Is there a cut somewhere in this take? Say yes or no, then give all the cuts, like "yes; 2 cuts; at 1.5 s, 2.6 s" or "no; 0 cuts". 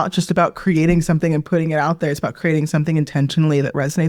no; 0 cuts